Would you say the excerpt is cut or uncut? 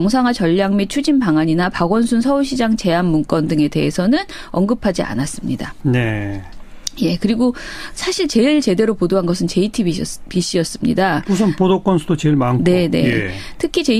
cut